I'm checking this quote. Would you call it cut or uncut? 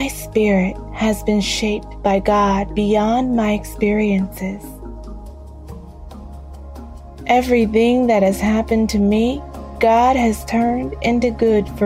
uncut